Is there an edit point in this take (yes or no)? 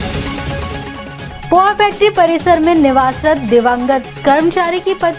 yes